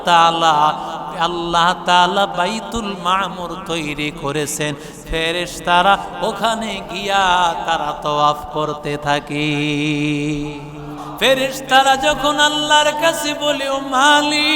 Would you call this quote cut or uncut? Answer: cut